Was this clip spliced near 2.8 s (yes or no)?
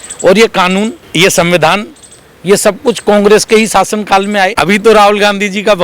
no